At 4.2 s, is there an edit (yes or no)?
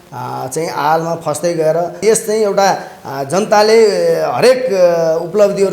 no